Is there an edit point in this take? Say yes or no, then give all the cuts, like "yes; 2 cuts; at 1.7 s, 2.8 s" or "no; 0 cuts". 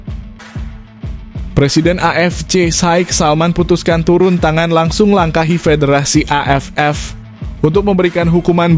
yes; 1 cut; at 1.5 s